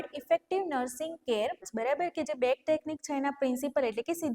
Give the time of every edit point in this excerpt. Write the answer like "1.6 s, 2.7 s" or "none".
1.7 s